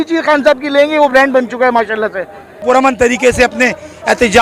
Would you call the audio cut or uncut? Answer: cut